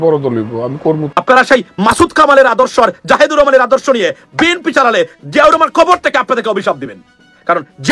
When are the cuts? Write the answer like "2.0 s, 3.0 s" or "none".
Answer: 1.1 s